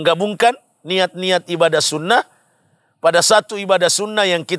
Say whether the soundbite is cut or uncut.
uncut